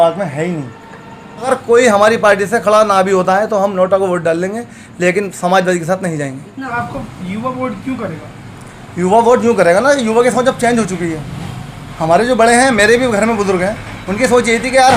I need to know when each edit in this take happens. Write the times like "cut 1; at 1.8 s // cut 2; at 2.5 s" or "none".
cut 1; at 1.5 s // cut 2; at 6.7 s